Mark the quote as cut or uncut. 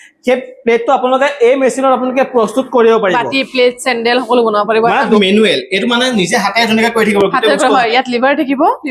cut